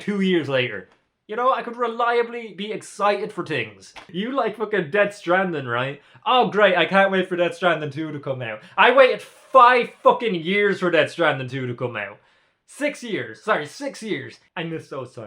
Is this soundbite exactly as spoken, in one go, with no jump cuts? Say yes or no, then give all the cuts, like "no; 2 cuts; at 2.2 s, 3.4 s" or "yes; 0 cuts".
no; 2 cuts; at 4.0 s, 14.4 s